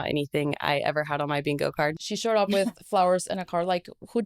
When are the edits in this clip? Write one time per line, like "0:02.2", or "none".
0:02.0